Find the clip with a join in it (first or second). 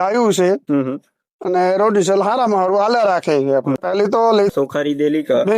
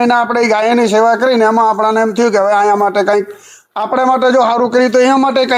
first